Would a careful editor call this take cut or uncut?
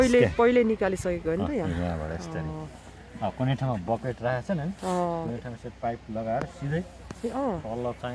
uncut